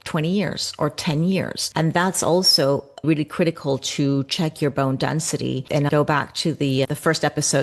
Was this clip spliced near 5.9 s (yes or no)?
yes